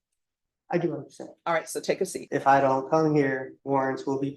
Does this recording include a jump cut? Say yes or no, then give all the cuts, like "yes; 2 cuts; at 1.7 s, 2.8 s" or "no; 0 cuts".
yes; 2 cuts; at 2.2 s, 3.5 s